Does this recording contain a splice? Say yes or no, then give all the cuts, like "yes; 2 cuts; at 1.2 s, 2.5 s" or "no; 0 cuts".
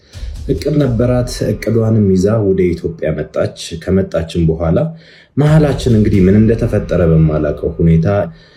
no; 0 cuts